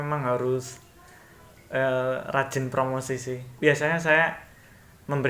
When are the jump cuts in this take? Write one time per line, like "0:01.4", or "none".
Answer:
0:03.5